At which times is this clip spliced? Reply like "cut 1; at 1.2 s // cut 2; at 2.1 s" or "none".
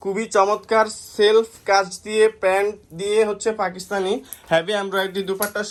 none